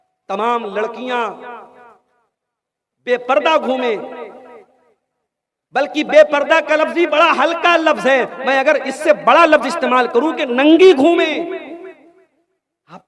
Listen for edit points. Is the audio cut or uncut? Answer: uncut